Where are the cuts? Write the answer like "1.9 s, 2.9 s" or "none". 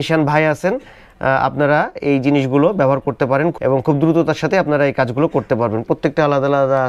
none